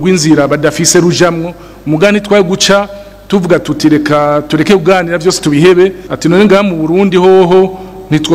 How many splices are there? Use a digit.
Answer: 1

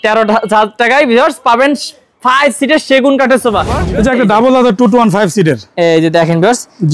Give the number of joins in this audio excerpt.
1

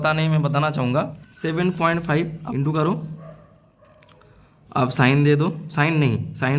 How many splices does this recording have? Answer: 2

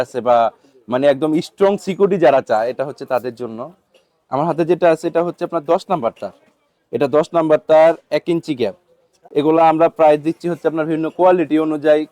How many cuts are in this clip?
0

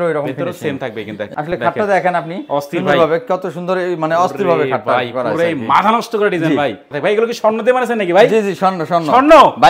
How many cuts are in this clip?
2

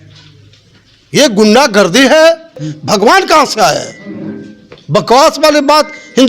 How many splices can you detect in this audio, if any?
1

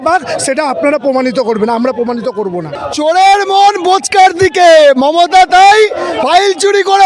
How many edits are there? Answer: 1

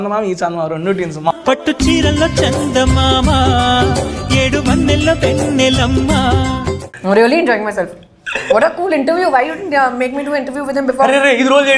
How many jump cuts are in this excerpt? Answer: 2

